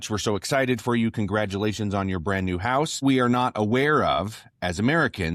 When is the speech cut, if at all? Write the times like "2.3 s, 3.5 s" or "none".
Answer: 3.0 s